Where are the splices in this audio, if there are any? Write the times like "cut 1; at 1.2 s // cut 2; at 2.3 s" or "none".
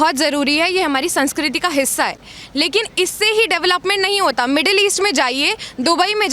none